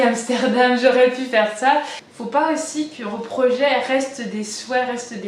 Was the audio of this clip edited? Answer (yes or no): yes